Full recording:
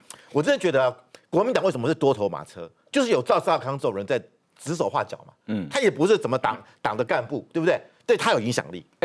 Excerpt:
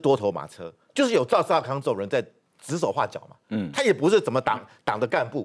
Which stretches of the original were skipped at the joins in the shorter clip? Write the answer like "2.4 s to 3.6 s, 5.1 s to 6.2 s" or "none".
none